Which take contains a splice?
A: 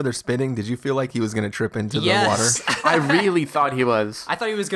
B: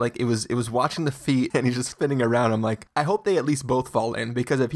B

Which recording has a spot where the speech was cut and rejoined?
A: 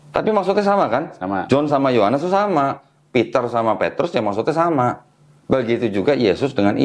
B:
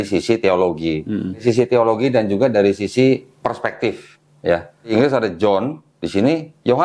B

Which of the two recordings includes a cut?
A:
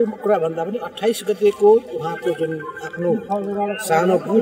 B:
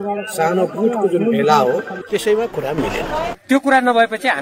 B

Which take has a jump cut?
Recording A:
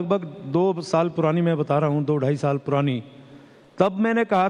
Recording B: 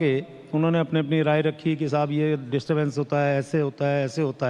B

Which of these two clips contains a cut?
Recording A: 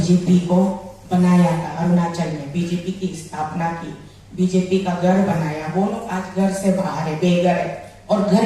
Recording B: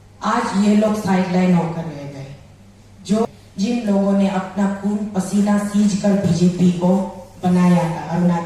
B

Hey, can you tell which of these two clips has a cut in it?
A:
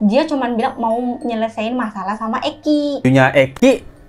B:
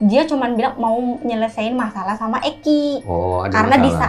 A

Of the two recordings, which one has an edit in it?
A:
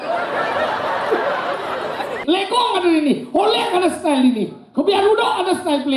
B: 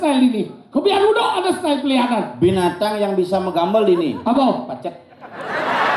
A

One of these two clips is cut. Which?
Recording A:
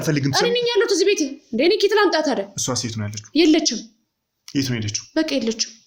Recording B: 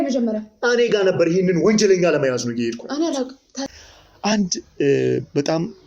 B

